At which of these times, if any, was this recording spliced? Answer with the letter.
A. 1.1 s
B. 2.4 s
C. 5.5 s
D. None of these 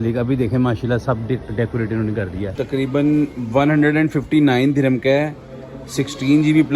B